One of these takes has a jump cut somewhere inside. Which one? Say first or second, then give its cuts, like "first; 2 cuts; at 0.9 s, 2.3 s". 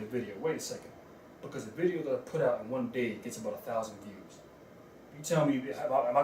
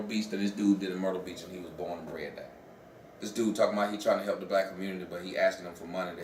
first; 1 cut; at 5.1 s